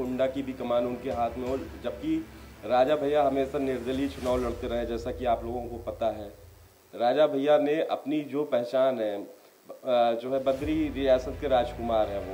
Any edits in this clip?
no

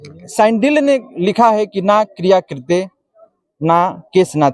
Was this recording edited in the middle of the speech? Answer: no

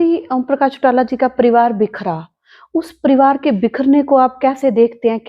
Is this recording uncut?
yes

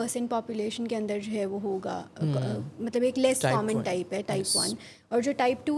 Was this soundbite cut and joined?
no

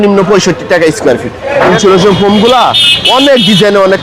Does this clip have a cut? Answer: yes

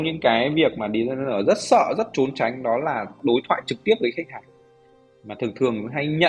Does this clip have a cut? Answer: no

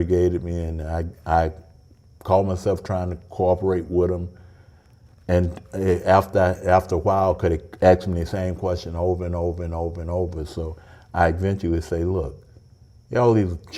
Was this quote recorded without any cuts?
yes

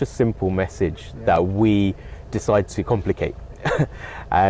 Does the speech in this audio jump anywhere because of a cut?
no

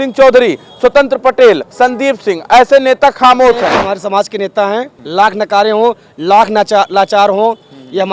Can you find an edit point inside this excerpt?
yes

